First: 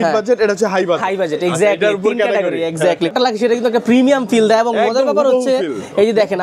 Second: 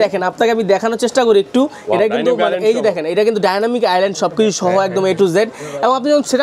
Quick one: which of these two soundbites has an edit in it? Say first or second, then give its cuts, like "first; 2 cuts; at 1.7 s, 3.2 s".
first; 1 cut; at 3.1 s